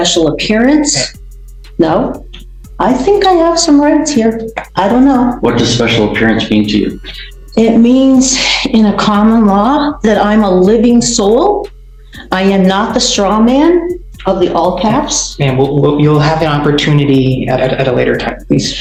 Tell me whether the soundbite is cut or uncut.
uncut